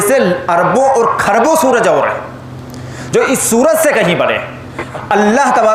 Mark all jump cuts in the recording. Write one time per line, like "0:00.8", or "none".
0:04.8